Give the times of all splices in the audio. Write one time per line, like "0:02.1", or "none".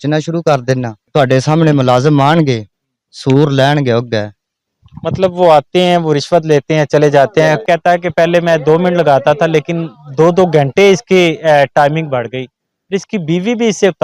0:00.9
0:07.6